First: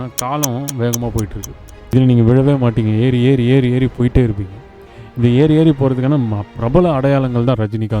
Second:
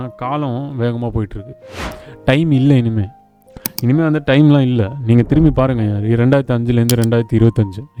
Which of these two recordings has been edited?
first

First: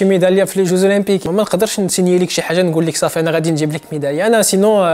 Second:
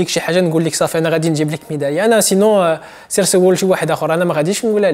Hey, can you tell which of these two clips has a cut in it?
first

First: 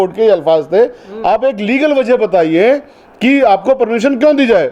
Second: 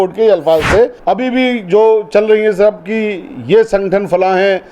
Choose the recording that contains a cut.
second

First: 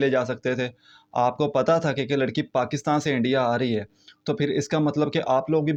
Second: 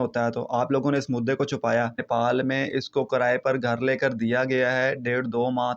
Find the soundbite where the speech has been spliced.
second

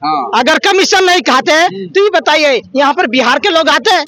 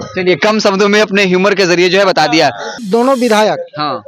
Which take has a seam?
second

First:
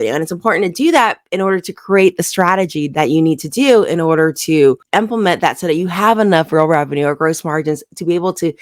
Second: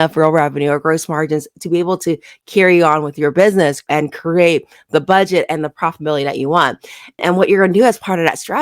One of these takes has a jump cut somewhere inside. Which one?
second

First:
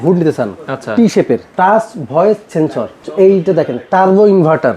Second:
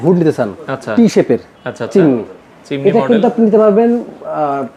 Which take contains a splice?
first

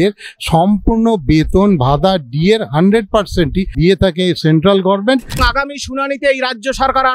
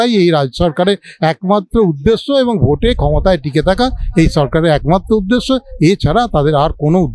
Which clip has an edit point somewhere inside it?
first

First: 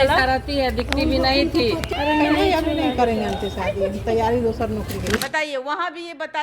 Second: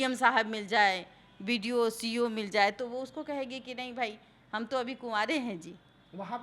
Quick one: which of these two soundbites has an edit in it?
first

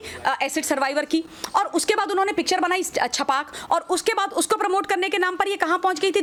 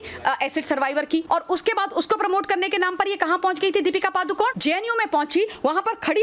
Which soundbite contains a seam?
second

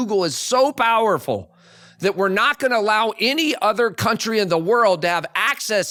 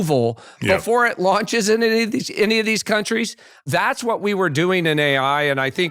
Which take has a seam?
second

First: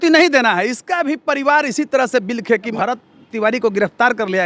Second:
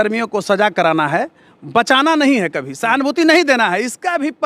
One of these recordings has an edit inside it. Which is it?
first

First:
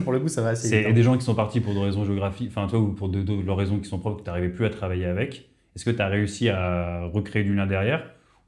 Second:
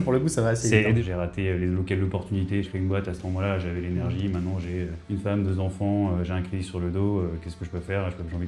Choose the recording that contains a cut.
second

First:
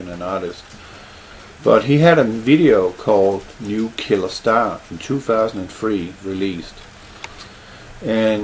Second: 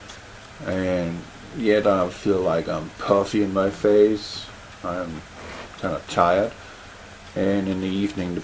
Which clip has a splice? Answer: second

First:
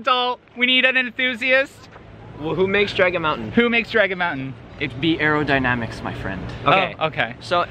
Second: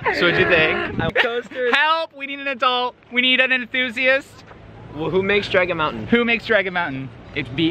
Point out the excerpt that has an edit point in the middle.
second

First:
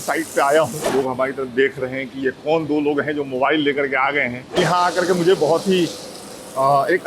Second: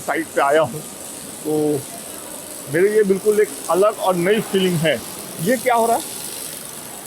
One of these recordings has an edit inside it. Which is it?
first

